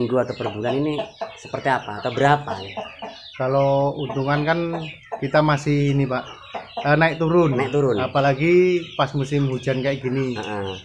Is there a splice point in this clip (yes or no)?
no